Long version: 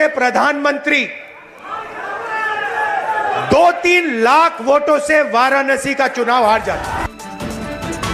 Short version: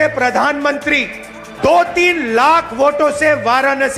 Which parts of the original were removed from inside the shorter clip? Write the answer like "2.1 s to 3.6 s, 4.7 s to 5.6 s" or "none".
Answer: 1.6 s to 3.4 s